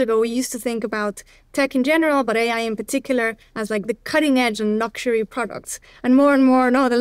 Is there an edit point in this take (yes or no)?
no